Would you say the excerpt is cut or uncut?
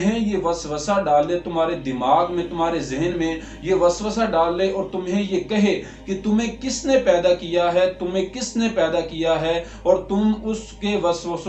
uncut